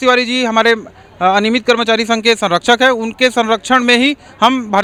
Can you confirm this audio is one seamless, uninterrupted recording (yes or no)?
yes